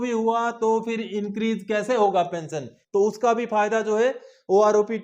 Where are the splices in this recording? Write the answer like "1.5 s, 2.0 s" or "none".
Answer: 2.7 s